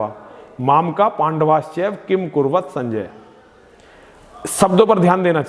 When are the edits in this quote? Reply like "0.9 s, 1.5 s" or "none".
none